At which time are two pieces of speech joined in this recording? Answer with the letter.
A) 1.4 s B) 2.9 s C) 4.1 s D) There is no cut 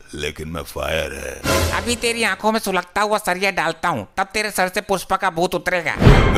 D